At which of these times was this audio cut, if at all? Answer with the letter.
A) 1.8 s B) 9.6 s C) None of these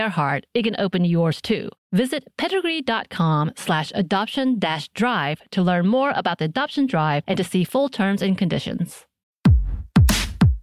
B